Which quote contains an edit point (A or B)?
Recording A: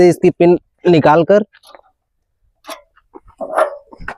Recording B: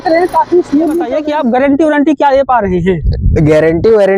B